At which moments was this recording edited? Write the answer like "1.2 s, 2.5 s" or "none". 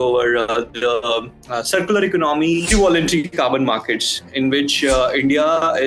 2.6 s